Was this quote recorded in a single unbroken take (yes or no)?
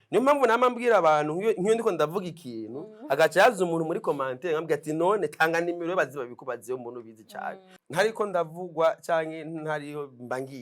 no